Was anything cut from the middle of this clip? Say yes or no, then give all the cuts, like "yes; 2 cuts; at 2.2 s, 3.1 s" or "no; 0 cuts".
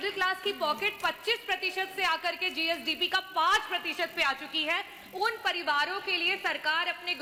no; 0 cuts